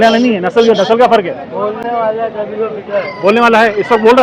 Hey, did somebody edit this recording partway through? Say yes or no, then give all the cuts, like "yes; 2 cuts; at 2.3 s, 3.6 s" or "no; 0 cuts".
no; 0 cuts